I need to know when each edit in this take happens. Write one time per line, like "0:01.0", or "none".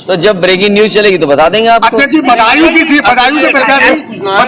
none